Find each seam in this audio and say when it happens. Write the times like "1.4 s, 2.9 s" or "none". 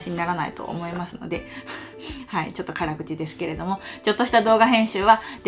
none